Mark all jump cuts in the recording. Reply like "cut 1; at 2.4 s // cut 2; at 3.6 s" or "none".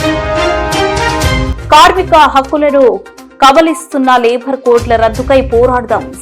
cut 1; at 1.5 s